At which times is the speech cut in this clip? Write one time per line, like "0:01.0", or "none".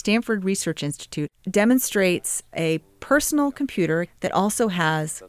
0:01.3
0:02.5
0:04.1